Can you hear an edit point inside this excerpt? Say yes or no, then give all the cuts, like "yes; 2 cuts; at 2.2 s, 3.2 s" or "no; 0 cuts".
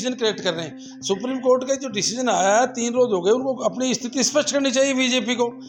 no; 0 cuts